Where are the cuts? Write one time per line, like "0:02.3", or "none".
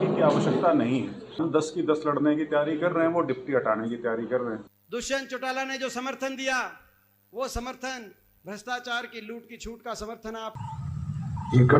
0:01.4
0:04.7
0:10.5